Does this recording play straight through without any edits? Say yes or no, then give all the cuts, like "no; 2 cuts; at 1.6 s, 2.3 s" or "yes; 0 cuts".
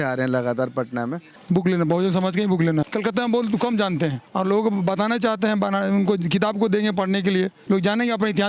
no; 4 cuts; at 1.3 s, 2.9 s, 4.2 s, 7.6 s